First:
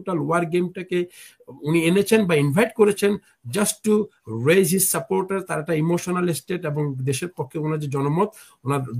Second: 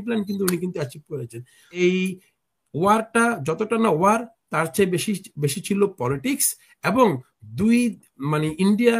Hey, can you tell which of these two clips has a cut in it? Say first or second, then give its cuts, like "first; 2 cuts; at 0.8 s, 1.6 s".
second; 1 cut; at 1.8 s